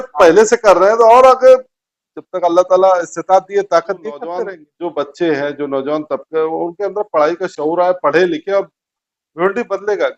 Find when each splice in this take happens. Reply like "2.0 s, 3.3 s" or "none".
4.6 s